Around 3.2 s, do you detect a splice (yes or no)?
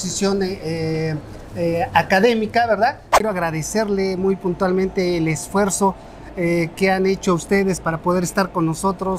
yes